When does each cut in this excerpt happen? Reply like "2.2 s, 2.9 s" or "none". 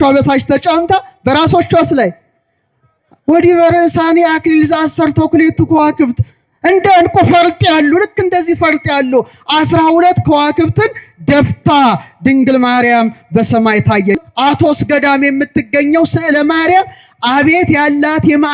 14.2 s